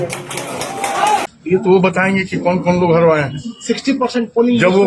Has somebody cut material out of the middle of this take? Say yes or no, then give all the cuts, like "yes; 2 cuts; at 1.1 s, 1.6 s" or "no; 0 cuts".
yes; 1 cut; at 1.3 s